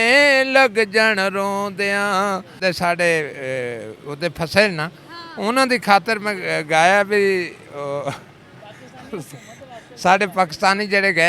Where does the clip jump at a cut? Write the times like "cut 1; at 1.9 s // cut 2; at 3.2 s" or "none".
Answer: cut 1; at 2.5 s